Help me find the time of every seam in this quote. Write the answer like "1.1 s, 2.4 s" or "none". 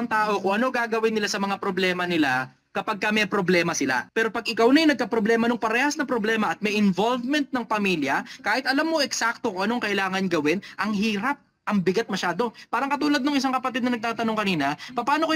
4.0 s